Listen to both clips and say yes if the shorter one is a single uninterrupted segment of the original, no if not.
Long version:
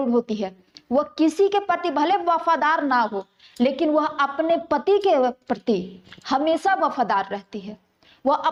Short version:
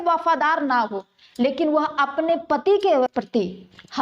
no